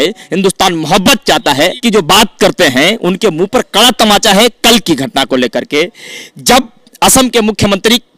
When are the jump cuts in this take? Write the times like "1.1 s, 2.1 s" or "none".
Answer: 1.8 s